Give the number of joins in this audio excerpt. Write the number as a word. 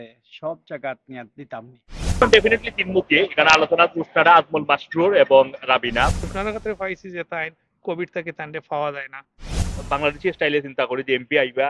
three